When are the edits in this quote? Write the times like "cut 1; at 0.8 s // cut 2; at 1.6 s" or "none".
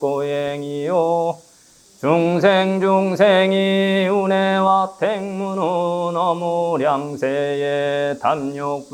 none

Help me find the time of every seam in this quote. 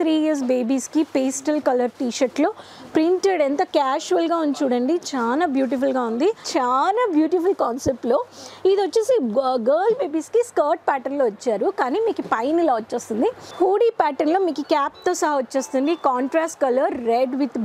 cut 1; at 6.4 s // cut 2; at 13.5 s

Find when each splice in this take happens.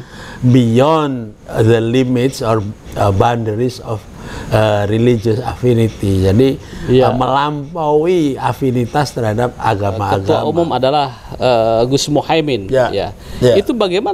cut 1; at 10.2 s

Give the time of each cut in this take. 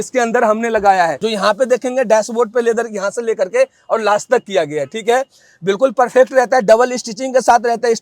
cut 1; at 1.2 s

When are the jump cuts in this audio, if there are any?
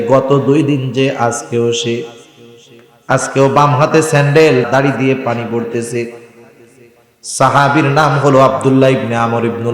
cut 1; at 4.7 s

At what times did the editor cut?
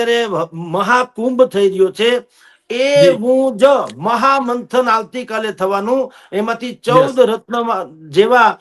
none

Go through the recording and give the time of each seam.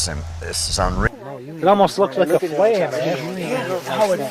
cut 1; at 1.1 s

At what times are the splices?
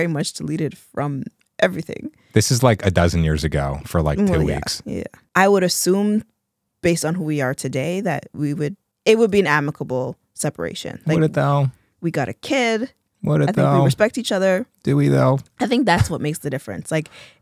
cut 1; at 5.1 s // cut 2; at 8.9 s

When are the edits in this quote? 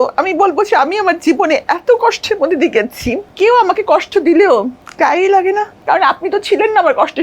cut 1; at 3.3 s // cut 2; at 4.8 s // cut 3; at 5.7 s

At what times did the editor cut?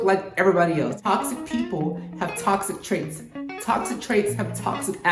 cut 1; at 1.0 s

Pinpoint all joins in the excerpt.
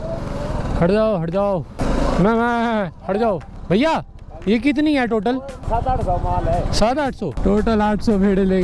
cut 1; at 1.8 s // cut 2; at 3.6 s // cut 3; at 5.6 s // cut 4; at 7.3 s

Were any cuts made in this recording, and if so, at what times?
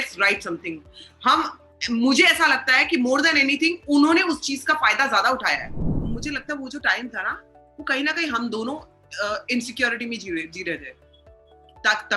cut 1; at 6.0 s

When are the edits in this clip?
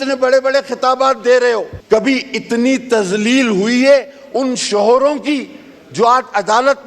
cut 1; at 1.7 s

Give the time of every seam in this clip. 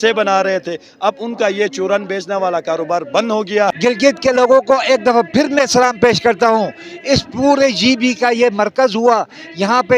cut 1; at 3.7 s

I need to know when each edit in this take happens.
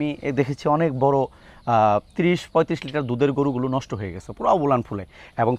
none

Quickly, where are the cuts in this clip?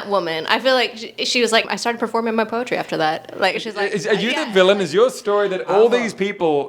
cut 1; at 1.7 s

